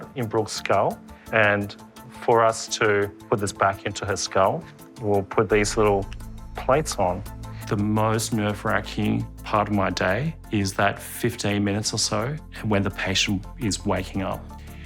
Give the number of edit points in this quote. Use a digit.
0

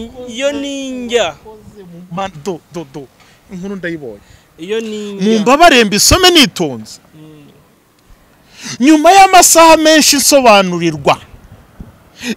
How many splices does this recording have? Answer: 0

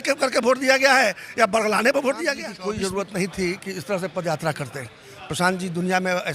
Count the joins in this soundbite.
1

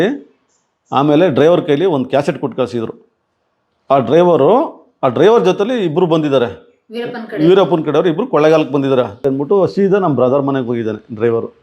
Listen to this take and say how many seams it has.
1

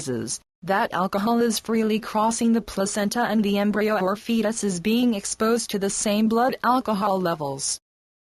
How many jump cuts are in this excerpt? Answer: 0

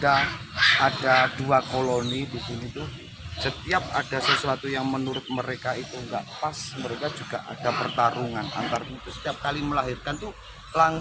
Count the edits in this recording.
1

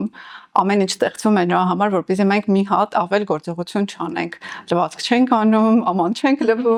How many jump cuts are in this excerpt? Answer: 0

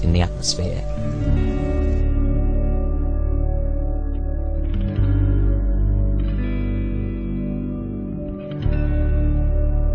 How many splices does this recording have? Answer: 1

